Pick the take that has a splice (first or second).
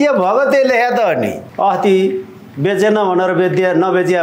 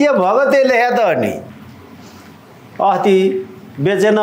first